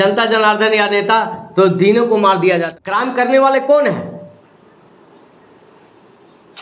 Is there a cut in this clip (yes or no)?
yes